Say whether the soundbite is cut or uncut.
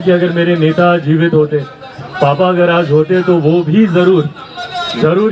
uncut